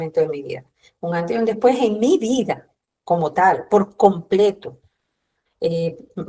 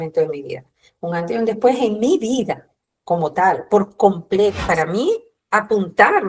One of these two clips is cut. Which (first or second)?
second